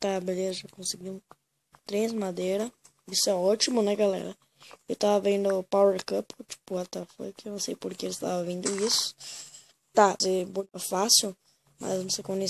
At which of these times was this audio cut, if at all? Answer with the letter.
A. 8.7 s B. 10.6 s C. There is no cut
B